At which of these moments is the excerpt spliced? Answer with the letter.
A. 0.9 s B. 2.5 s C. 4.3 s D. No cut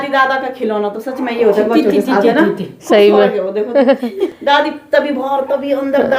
C